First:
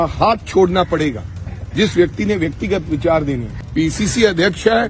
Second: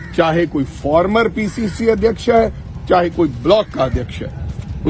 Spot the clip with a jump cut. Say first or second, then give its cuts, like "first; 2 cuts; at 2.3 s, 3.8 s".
first; 1 cut; at 3.6 s